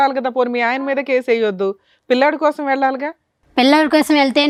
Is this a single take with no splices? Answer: yes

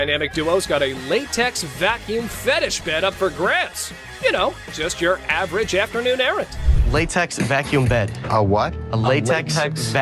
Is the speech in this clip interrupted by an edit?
no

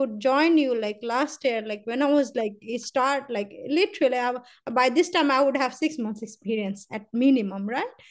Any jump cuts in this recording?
no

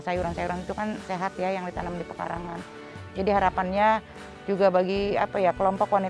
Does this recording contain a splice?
no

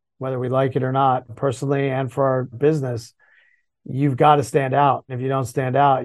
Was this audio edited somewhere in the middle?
yes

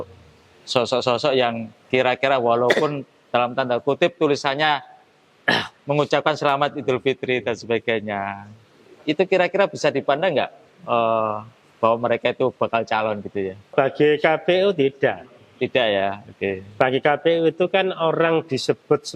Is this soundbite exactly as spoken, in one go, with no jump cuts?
no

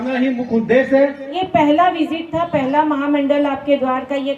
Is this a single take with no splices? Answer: no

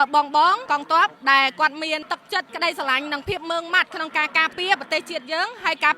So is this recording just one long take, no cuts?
yes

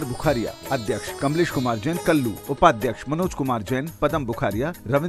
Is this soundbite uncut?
no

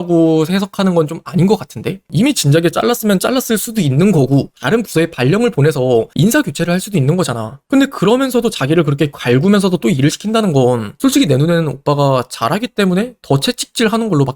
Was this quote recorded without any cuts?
no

